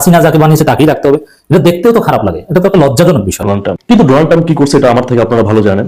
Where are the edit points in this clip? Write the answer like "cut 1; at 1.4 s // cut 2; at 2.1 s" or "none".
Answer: cut 1; at 3.4 s

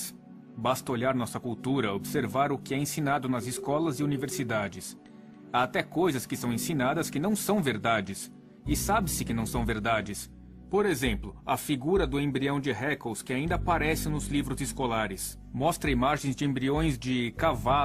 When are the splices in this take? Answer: cut 1; at 10.8 s

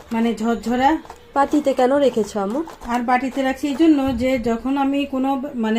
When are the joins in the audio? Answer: none

